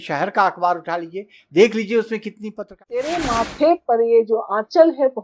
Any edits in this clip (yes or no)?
yes